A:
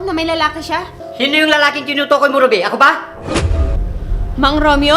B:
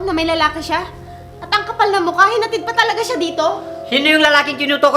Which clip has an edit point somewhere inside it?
A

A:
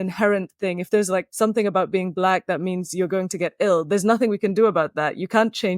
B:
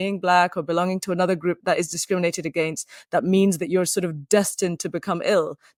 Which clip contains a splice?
A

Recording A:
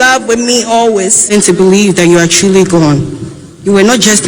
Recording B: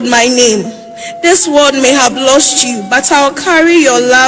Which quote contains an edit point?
A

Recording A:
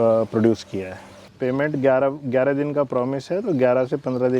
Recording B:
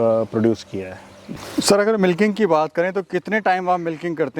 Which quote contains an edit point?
A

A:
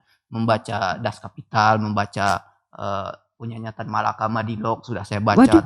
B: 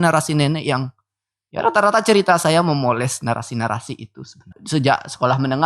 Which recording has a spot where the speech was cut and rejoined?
B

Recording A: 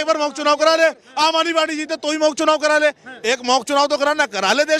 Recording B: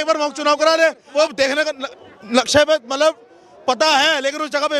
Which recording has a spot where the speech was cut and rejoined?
B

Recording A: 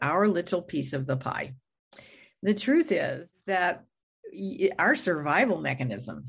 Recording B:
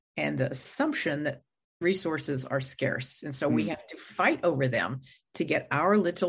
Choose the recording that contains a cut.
A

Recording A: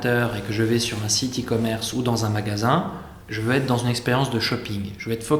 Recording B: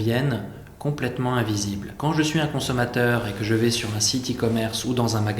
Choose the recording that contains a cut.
B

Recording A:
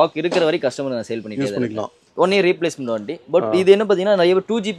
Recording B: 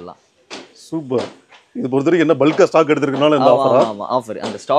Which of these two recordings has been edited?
A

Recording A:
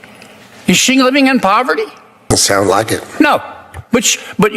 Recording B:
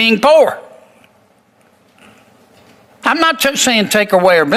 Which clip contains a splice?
A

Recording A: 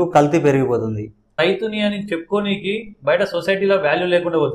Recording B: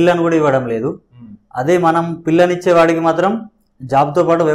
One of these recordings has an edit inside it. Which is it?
A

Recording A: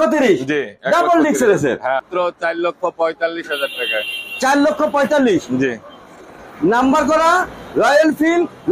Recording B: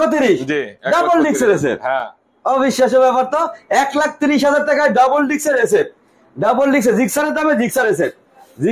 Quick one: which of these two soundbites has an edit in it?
A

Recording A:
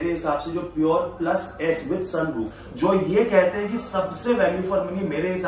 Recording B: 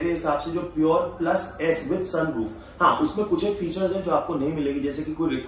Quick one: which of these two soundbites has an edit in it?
A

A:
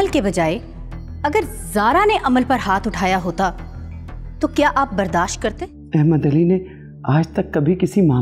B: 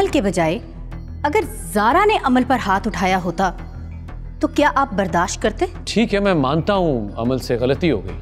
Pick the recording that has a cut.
A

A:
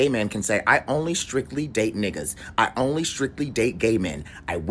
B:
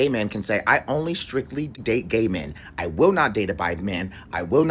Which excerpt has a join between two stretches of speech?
B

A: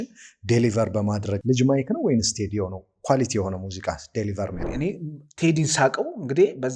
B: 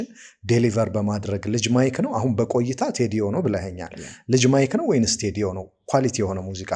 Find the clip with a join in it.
A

